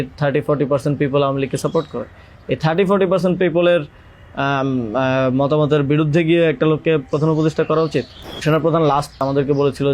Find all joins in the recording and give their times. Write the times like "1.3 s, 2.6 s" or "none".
8.4 s, 9.2 s